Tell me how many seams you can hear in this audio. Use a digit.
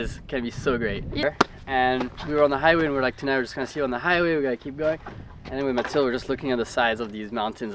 1